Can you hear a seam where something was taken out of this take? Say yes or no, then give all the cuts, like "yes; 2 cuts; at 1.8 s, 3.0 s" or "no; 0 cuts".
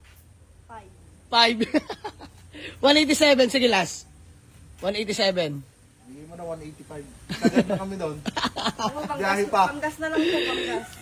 no; 0 cuts